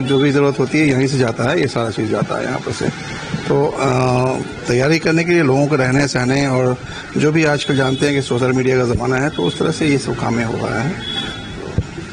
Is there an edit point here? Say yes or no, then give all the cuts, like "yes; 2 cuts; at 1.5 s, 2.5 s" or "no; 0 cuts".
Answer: no; 0 cuts